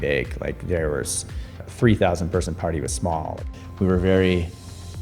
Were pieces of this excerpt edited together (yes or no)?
yes